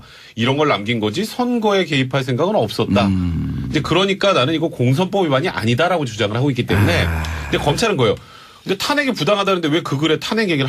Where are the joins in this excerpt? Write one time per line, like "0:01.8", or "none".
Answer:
0:08.1